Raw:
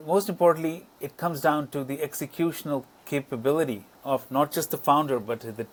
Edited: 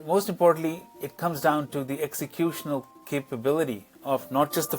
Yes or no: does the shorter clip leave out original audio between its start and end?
no